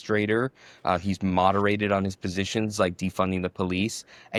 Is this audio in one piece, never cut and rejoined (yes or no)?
yes